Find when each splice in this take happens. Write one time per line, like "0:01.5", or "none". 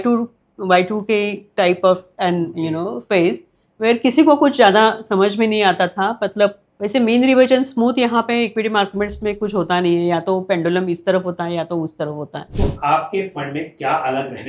0:06.7
0:12.4